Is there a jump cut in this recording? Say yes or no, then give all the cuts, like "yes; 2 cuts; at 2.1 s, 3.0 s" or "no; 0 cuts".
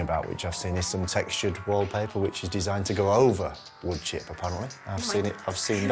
no; 0 cuts